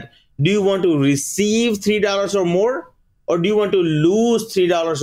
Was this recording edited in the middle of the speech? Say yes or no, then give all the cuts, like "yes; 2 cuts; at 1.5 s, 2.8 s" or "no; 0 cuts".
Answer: no; 0 cuts